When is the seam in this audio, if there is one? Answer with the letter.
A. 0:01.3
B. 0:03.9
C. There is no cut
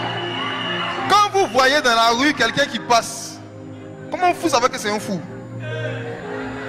C